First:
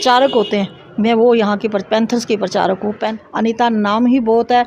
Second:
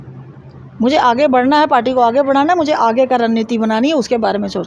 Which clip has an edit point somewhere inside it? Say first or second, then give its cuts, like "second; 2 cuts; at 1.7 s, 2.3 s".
first; 1 cut; at 3.1 s